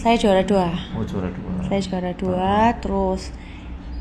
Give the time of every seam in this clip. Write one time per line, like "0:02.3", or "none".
none